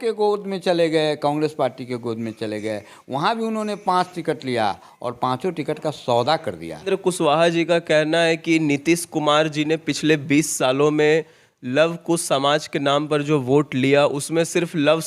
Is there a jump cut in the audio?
yes; 1 cut; at 6.8 s

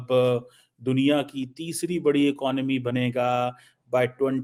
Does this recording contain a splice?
no; 0 cuts

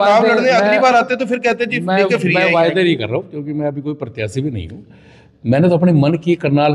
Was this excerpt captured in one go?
yes; 0 cuts

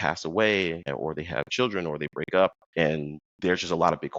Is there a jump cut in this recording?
yes; 2 cuts; at 0.9 s, 2.9 s

